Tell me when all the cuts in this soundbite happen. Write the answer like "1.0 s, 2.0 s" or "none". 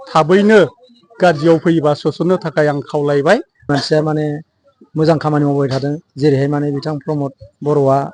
3.7 s